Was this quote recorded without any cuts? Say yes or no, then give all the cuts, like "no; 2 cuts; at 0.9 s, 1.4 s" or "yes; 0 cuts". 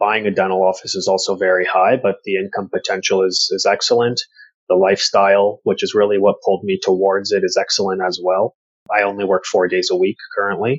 no; 1 cut; at 8.7 s